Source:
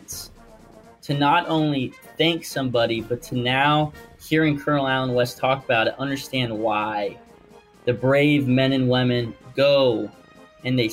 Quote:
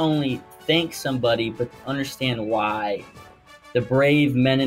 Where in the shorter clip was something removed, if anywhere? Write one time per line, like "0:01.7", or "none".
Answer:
0:01.8